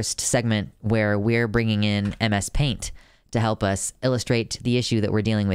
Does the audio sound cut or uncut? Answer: uncut